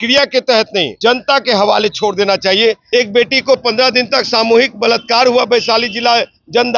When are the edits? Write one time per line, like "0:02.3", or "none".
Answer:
0:00.9
0:02.8